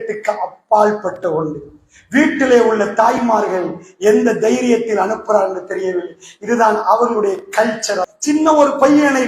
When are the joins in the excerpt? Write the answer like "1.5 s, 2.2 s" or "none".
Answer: 8.1 s